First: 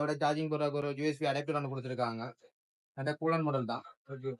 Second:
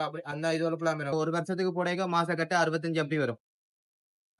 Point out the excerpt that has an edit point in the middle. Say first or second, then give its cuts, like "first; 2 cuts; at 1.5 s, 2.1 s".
second; 1 cut; at 1.1 s